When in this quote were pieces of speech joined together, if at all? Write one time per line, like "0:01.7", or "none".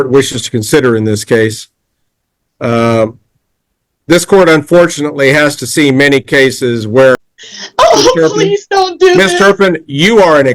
0:07.2